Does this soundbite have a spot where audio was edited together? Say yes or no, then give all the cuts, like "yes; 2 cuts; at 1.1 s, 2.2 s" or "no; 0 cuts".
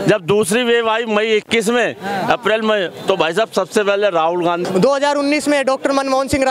yes; 1 cut; at 4.6 s